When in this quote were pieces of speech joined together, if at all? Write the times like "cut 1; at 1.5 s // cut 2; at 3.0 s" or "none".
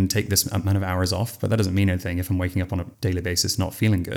cut 1; at 2.9 s